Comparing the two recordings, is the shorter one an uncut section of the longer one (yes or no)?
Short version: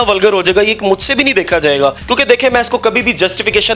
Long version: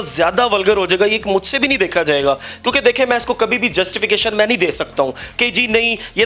no